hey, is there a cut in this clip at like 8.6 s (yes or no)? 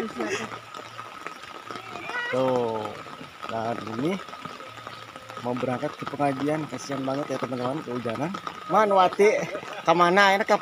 yes